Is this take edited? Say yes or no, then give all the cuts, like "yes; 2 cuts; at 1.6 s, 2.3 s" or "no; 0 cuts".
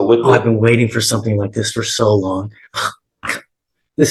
no; 0 cuts